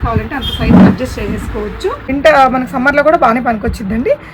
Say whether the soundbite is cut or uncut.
cut